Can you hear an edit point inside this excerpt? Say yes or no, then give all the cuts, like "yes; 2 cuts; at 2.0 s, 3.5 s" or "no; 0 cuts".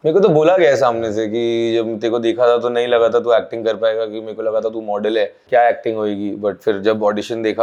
no; 0 cuts